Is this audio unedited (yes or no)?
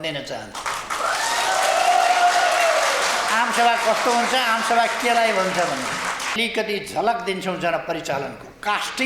no